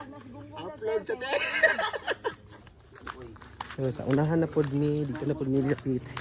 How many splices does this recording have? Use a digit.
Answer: 1